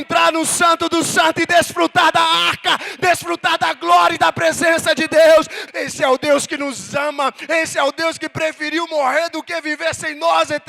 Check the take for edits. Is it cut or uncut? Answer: cut